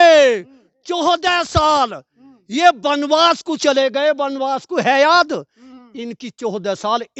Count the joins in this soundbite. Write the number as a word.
zero